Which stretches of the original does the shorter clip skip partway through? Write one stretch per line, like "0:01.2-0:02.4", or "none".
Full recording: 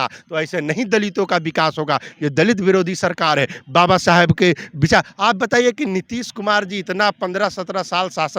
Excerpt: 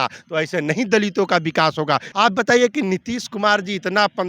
0:02.1-0:05.1